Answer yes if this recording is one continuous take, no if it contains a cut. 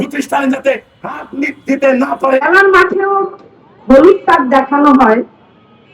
no